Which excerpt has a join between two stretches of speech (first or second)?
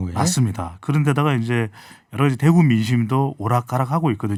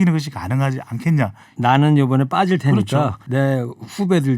second